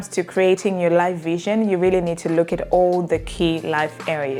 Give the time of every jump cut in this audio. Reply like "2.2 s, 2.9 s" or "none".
none